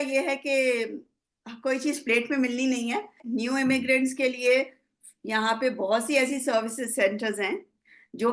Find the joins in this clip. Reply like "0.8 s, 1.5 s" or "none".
3.2 s